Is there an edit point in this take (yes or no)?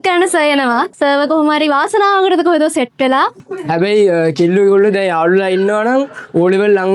yes